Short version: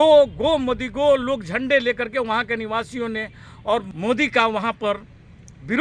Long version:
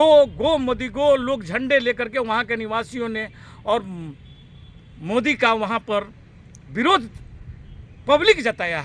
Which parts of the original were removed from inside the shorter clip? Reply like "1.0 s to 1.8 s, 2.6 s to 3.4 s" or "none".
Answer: 3.9 s to 5.0 s